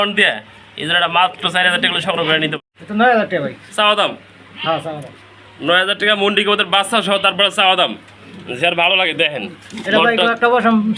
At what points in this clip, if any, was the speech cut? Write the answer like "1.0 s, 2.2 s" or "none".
2.5 s